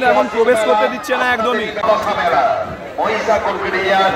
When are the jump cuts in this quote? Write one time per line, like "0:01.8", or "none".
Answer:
0:01.8